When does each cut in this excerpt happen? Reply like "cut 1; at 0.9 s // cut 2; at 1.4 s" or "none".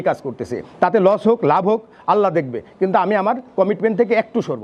none